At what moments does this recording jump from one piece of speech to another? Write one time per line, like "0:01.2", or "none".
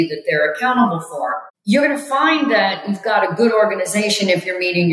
0:01.5